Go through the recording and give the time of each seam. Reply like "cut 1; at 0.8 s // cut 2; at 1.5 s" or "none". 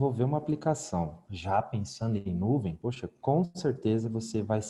cut 1; at 1.3 s // cut 2; at 2.7 s